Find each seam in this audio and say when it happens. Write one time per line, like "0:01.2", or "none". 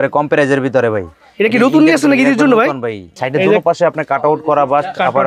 0:03.1